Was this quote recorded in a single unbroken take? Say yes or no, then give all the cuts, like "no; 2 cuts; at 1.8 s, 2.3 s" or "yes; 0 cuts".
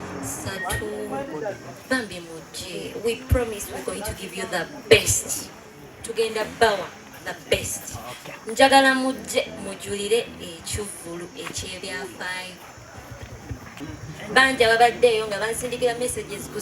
no; 1 cut; at 13.7 s